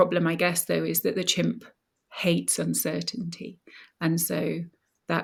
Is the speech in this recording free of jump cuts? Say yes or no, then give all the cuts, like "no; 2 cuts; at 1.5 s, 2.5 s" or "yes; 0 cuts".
yes; 0 cuts